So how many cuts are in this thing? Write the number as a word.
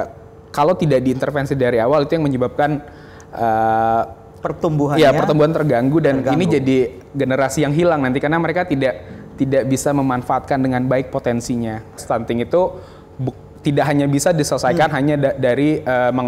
one